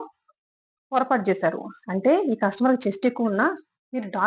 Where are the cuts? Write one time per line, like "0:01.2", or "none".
none